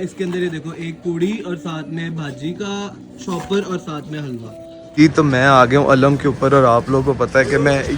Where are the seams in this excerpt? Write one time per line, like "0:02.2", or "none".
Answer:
0:04.8